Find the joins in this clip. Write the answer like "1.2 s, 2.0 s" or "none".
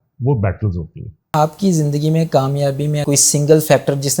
1.3 s, 3.0 s